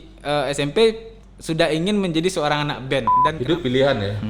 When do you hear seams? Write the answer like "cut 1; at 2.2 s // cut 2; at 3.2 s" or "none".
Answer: cut 1; at 3.2 s